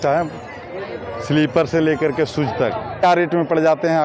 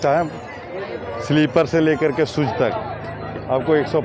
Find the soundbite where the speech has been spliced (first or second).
first